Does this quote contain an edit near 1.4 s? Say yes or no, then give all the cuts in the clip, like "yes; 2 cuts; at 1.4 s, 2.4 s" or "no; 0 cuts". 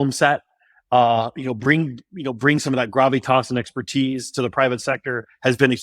no; 0 cuts